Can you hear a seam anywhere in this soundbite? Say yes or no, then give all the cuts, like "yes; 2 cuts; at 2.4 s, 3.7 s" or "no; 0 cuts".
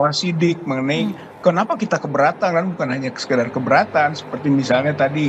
no; 0 cuts